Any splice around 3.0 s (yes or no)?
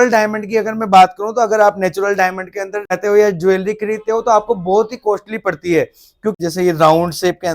yes